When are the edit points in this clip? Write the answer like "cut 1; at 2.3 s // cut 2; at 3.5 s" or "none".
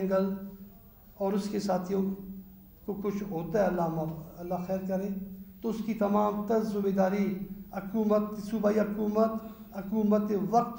none